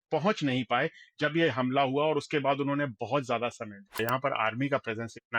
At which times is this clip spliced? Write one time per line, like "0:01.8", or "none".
0:04.0